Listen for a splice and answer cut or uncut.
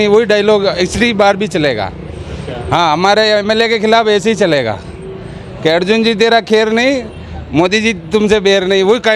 uncut